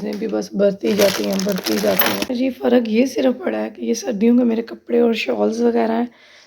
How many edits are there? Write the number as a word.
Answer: one